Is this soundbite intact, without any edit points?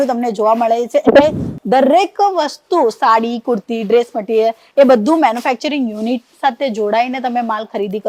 yes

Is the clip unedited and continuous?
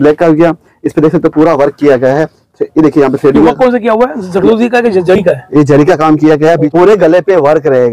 no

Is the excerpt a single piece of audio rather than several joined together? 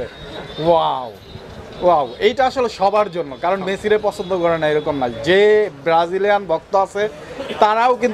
yes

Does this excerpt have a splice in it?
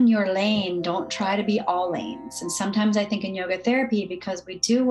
no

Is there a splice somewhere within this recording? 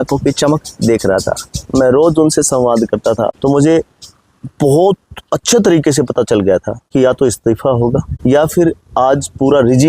yes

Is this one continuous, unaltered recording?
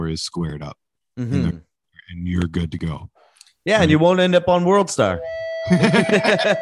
no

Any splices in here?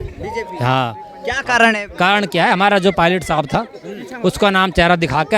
no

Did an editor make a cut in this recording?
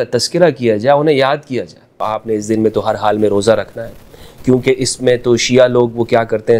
yes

